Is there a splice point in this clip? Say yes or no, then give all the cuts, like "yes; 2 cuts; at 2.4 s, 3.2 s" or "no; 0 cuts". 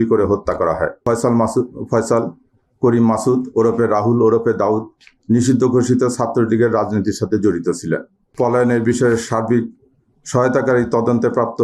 yes; 2 cuts; at 1.0 s, 8.2 s